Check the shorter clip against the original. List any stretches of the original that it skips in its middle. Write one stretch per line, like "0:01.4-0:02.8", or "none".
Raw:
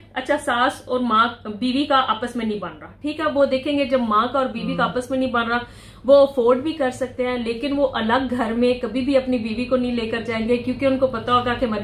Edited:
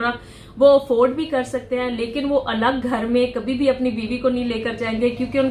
none